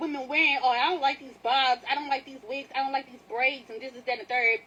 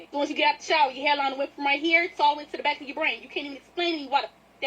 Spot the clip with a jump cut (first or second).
second